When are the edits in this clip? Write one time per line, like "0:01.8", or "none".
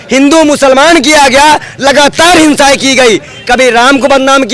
none

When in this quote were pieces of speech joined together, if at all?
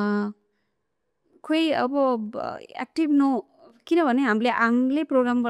none

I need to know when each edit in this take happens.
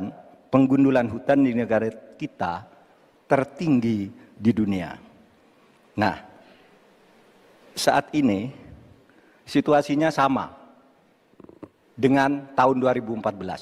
none

